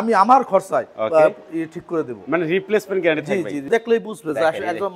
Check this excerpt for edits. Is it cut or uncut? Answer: cut